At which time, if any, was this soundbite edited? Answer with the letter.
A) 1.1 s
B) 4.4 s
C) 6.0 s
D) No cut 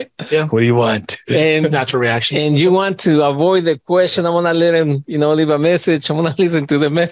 D